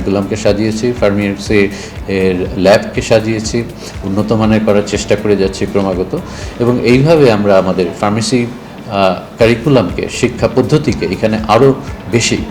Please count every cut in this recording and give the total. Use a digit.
0